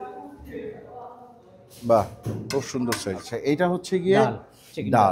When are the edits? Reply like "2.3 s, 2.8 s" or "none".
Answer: 3.3 s